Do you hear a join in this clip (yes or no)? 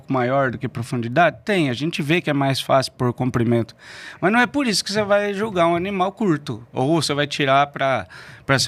no